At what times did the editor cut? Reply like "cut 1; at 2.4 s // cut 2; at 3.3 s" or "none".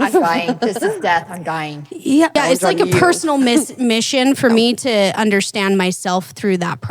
cut 1; at 2.4 s